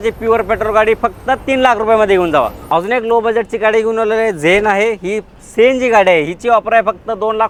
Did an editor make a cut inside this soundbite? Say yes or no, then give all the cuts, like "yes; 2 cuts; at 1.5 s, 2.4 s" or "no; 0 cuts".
no; 0 cuts